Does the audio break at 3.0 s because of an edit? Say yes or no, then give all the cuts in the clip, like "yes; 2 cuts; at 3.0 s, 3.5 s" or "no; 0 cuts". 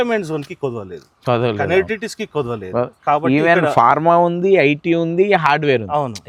no; 0 cuts